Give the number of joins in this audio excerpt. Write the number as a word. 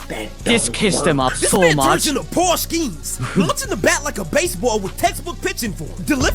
zero